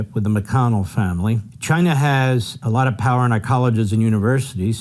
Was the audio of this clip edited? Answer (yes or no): yes